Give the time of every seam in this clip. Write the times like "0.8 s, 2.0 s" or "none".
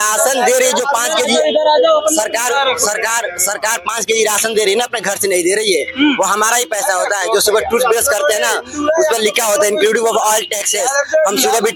none